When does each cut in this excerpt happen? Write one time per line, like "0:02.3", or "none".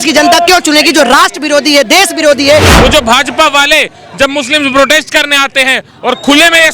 0:02.7